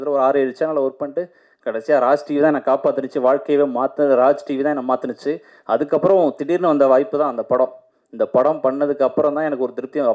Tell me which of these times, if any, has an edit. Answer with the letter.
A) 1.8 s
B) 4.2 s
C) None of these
C